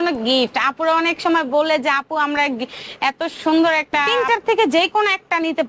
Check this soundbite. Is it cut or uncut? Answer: cut